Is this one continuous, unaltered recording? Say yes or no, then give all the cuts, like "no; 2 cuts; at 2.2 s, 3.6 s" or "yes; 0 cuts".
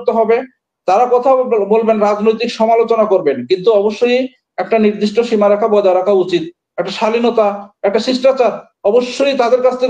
yes; 0 cuts